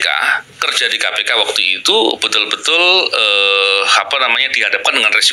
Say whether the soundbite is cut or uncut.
uncut